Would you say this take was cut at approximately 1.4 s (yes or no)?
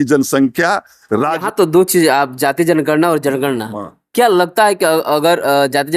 yes